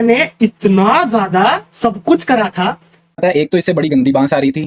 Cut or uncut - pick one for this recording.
cut